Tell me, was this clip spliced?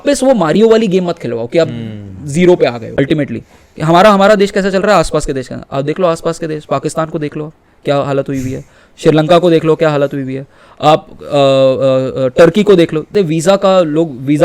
yes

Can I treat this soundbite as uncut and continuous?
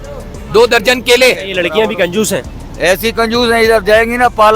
no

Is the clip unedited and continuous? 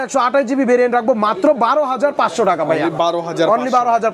yes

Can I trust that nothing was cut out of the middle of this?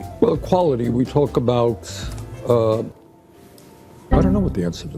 yes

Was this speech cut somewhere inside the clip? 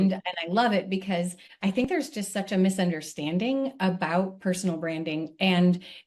yes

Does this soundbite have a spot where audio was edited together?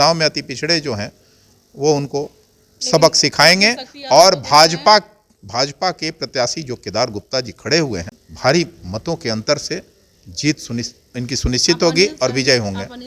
no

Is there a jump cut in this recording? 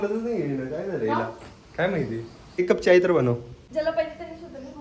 yes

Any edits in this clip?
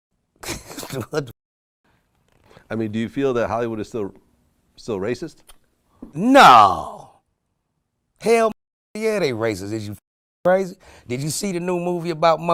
no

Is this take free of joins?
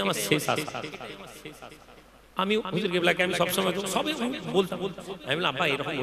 yes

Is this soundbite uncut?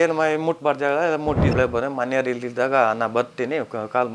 no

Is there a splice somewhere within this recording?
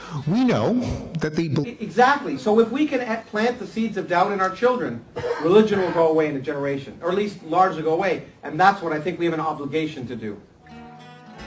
no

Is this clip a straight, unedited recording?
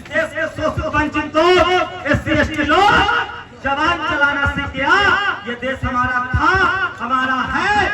yes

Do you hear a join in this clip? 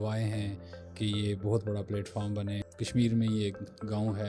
yes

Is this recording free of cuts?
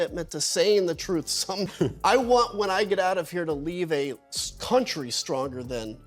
no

